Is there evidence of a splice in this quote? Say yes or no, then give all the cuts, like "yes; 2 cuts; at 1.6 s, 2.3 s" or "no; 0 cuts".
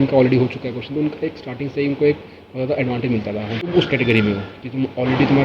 yes; 1 cut; at 3.7 s